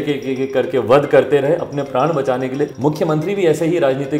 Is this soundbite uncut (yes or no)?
no